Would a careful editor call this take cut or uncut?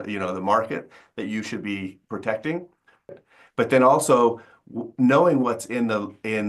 cut